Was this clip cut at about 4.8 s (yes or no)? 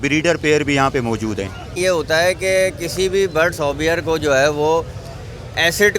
no